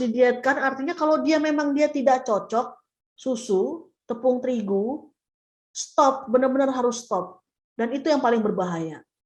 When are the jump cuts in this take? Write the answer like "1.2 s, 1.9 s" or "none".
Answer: none